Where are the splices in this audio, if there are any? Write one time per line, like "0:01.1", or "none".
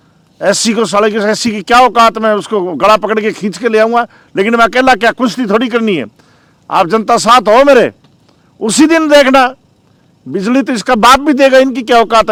none